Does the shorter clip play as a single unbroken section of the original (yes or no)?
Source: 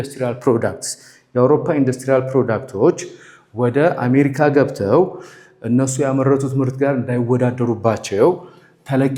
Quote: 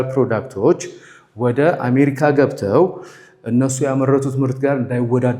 yes